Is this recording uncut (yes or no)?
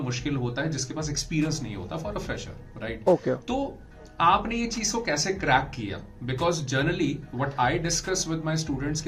yes